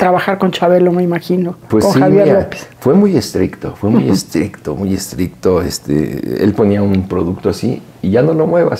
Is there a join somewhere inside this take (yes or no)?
no